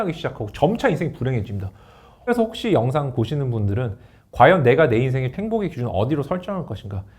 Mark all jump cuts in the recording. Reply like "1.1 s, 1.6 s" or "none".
2.3 s, 5.3 s